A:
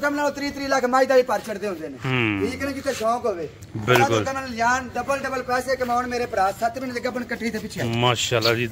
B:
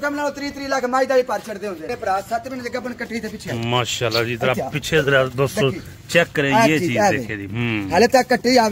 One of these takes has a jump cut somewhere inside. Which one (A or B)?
B